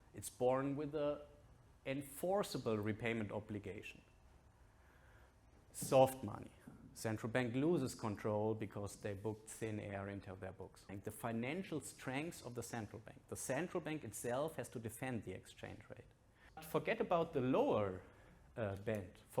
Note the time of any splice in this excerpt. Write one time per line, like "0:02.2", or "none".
0:10.9
0:16.6